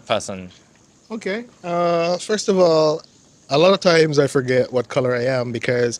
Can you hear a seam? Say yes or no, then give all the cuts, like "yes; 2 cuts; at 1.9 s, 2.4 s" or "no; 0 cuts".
no; 0 cuts